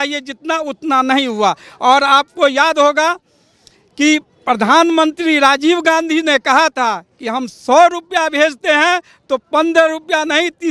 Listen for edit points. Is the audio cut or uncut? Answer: uncut